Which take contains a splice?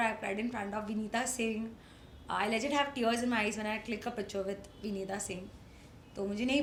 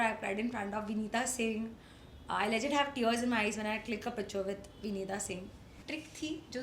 second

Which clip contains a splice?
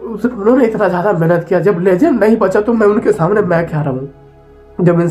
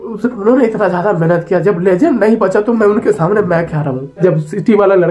second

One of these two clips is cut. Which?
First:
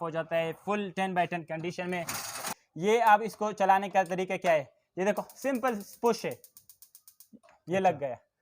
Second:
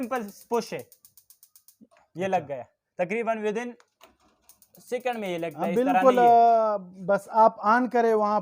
first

